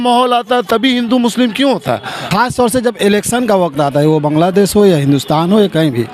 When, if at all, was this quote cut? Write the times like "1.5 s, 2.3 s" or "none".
2.2 s